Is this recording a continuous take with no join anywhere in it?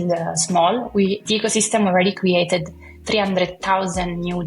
no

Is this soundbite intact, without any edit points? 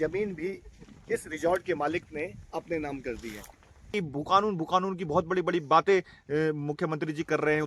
no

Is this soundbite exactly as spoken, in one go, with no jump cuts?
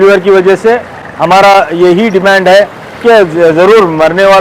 yes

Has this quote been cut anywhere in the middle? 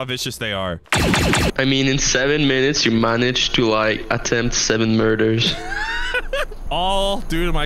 yes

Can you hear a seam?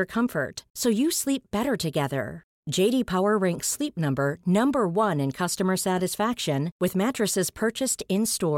no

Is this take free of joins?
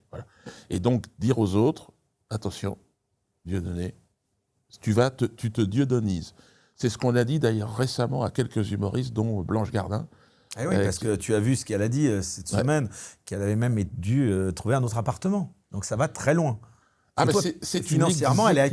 yes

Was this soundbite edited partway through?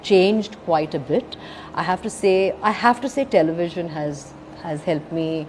no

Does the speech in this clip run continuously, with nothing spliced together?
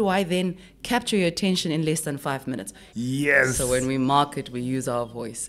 no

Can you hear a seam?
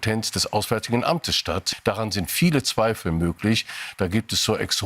yes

